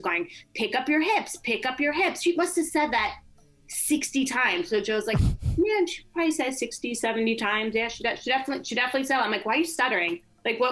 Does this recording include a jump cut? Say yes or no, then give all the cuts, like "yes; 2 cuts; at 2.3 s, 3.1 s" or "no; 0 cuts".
no; 0 cuts